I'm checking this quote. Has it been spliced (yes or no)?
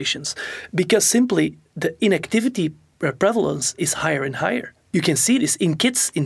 yes